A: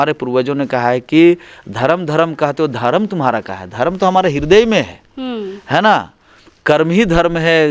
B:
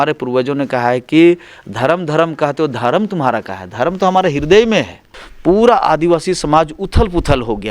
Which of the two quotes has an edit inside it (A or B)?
B